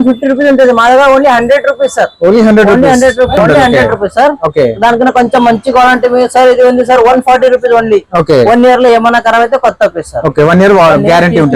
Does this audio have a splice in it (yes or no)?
yes